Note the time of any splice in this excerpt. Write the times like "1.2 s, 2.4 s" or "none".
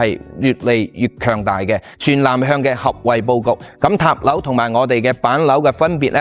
1.9 s